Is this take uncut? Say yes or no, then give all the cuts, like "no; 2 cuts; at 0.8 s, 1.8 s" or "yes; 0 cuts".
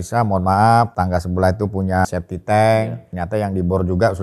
no; 3 cuts; at 0.9 s, 2.1 s, 3.1 s